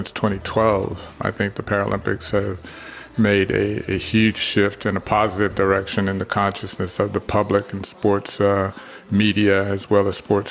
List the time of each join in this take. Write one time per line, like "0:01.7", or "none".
0:01.2